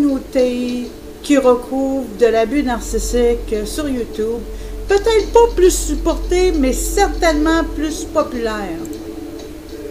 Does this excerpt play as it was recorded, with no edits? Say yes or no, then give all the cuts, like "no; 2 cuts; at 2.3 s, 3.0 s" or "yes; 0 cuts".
no; 1 cut; at 2.1 s